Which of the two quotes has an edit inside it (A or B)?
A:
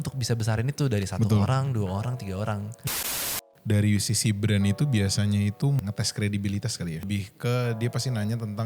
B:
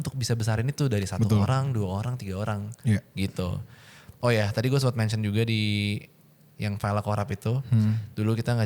A